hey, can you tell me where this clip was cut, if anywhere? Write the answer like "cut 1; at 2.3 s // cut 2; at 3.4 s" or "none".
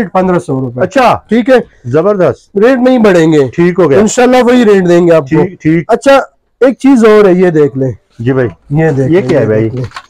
none